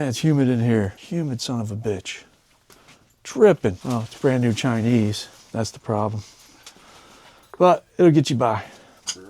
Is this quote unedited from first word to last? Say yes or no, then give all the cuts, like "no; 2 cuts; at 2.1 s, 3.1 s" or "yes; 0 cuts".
no; 2 cuts; at 1.0 s, 3.8 s